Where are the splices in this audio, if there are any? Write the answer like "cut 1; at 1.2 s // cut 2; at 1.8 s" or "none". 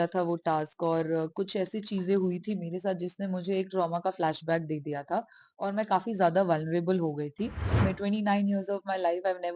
cut 1; at 7.8 s